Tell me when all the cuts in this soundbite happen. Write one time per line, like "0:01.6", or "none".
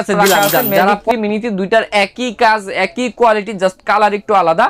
0:01.1